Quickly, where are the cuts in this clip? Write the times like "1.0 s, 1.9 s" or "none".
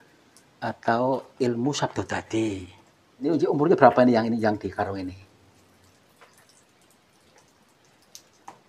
3.3 s